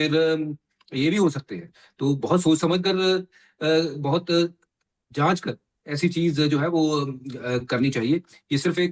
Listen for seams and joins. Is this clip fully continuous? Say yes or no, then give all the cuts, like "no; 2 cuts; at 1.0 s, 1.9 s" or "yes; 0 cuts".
yes; 0 cuts